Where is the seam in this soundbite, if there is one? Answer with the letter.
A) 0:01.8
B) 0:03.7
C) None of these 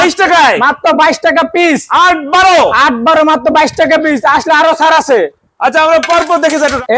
C